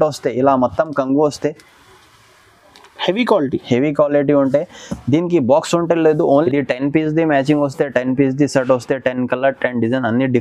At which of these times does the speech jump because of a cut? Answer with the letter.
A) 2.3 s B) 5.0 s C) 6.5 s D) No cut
C